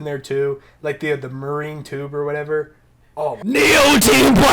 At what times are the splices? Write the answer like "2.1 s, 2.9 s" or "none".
3.4 s